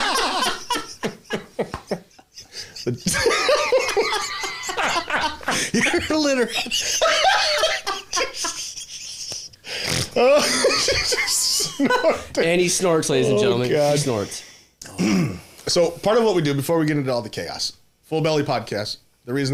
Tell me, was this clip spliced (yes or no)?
no